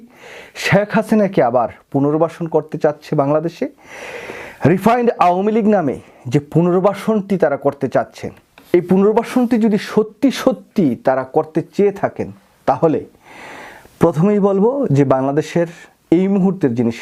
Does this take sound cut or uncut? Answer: uncut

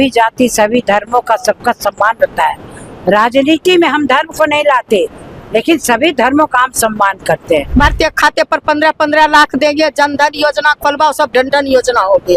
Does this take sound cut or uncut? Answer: cut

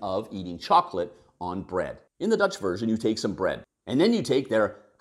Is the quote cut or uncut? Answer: cut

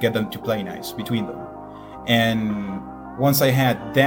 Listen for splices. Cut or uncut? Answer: uncut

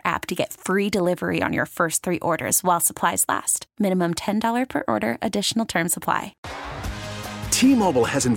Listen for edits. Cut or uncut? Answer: cut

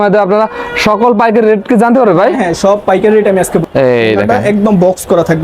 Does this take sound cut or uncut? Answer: cut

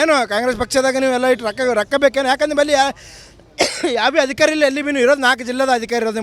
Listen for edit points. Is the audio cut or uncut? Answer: uncut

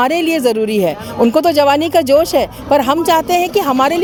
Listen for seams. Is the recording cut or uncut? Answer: uncut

